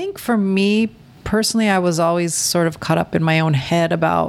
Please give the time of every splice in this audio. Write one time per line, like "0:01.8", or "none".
0:01.1